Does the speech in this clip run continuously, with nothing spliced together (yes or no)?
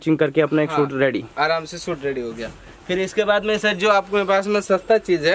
yes